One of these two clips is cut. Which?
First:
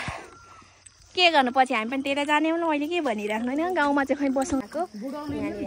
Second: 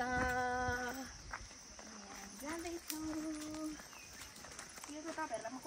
first; 1 cut; at 4.6 s

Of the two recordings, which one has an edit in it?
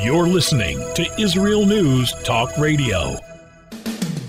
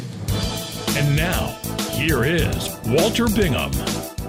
first; 1 cut; at 3.2 s

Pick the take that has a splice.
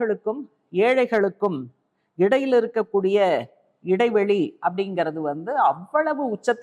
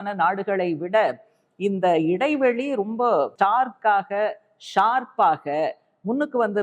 second; 1 cut; at 3.3 s

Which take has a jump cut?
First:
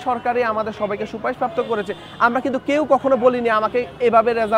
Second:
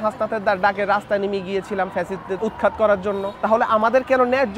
second; 2 cuts; at 2.4 s, 3.3 s

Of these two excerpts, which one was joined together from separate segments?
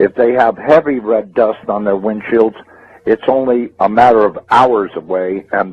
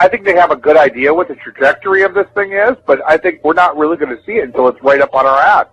second; 1 cut; at 3.0 s

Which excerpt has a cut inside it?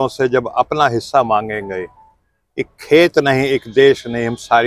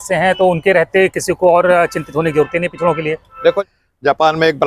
second; 1 cut; at 3.6 s

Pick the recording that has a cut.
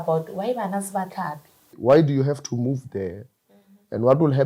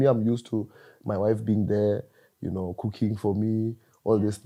first; 1 cut; at 1.8 s

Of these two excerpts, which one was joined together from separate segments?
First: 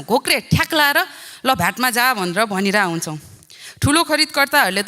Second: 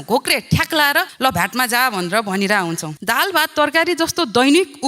second; 2 cuts; at 1.1 s, 2.9 s

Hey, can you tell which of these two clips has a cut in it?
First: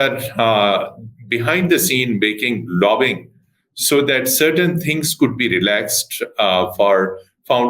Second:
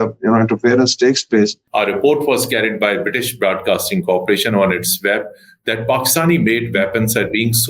second; 1 cut; at 1.6 s

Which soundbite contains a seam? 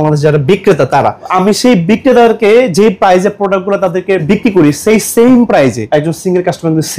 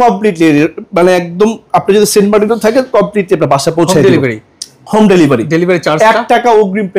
first; 3 cuts; at 1.3 s, 4.2 s, 5.8 s

